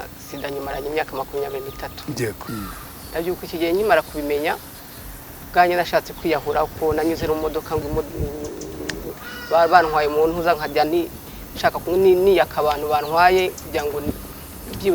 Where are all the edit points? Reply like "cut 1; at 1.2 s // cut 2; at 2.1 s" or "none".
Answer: cut 1; at 2.4 s